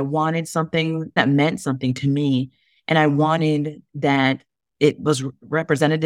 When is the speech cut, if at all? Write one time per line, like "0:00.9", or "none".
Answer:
0:01.2